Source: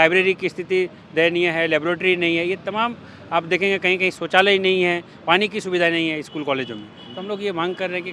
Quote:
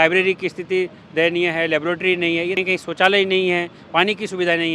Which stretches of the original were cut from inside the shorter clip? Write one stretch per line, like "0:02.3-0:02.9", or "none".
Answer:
0:02.6-0:03.9